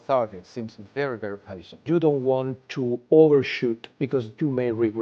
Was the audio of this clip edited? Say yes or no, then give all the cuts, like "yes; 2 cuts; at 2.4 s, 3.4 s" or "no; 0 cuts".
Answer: yes; 2 cuts; at 1.8 s, 3.9 s